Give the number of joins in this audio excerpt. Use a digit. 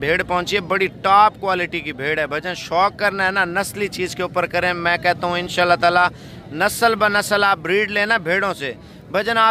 0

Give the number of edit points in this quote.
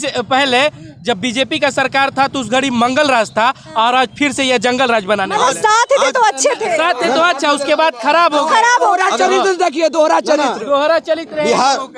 0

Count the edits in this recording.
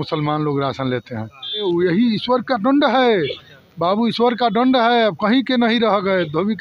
1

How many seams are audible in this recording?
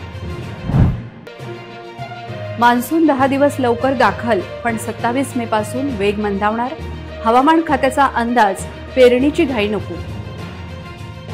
1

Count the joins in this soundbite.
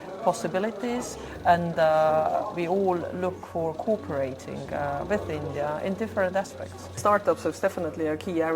1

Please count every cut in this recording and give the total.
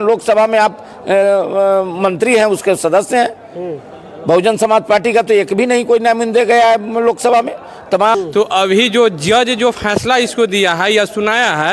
1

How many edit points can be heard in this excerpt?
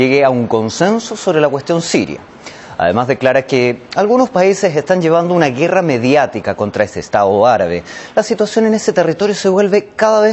1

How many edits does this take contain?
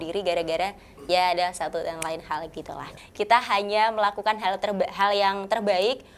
1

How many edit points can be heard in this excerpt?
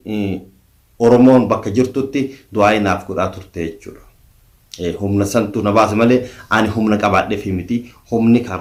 0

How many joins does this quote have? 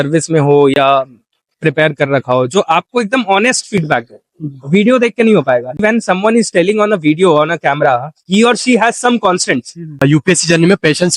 2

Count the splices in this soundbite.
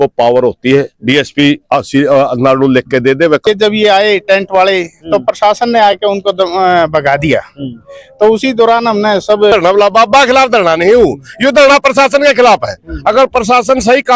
2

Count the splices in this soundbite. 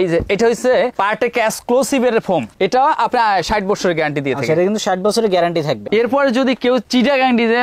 2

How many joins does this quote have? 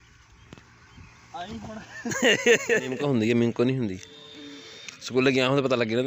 1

